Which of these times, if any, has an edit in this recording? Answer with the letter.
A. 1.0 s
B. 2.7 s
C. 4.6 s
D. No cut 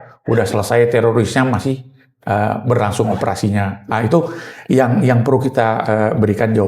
D